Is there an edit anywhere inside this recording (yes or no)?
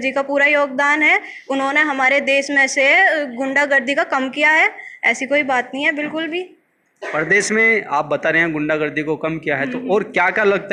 no